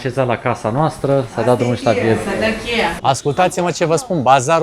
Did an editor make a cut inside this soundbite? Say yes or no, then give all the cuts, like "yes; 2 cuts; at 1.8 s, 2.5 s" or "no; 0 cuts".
yes; 1 cut; at 3.0 s